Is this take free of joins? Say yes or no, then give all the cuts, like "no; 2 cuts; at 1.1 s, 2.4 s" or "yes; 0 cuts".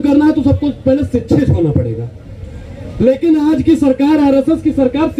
yes; 0 cuts